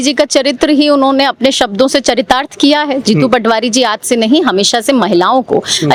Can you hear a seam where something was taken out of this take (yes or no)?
no